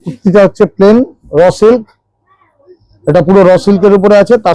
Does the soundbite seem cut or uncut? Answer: uncut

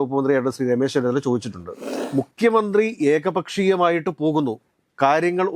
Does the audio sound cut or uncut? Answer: cut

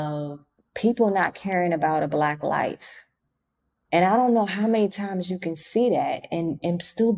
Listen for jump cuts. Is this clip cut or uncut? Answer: uncut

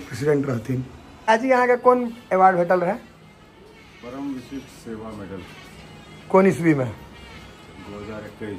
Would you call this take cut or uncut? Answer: cut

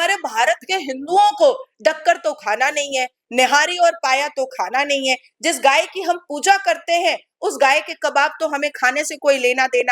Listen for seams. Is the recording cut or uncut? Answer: uncut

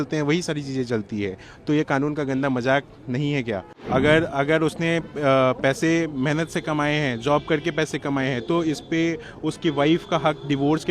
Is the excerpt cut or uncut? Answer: cut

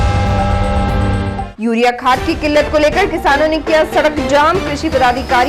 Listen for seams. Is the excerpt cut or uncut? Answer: cut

